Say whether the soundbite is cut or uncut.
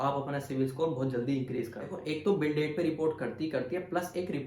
cut